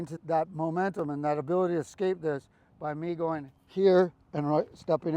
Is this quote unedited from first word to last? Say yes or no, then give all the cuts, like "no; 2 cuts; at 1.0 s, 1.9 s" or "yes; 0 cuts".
yes; 0 cuts